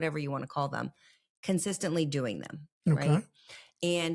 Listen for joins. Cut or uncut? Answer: uncut